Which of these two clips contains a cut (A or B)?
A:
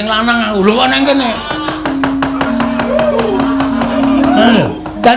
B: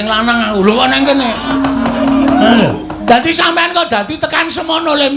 B